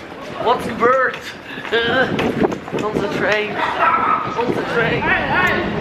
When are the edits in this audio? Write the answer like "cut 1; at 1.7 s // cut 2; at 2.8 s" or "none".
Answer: cut 1; at 4.9 s